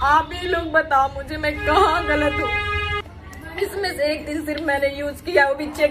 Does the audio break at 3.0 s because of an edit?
yes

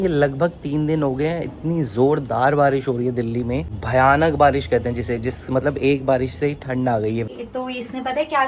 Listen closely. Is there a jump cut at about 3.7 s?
yes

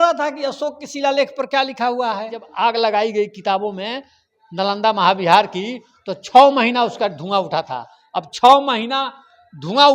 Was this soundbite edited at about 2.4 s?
yes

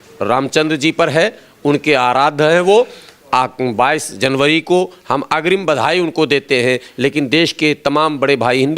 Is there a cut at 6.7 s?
no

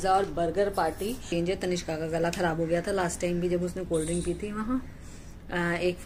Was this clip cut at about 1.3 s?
yes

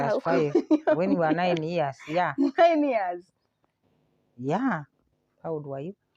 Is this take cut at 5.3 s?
yes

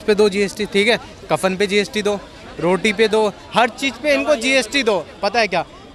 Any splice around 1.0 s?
no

